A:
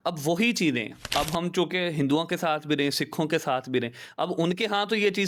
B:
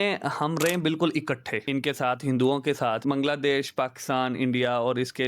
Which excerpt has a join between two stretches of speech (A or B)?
B